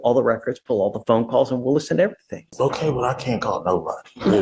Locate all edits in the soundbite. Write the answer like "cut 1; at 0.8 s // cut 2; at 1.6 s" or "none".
cut 1; at 2.5 s